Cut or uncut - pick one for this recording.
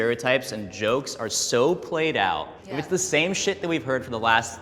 uncut